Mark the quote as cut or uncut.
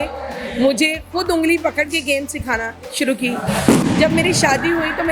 uncut